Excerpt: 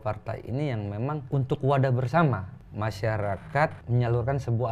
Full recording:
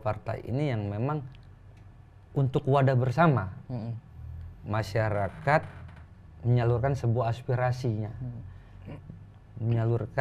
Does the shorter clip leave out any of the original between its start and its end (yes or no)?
yes